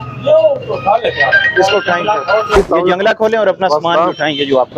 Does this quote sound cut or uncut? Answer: cut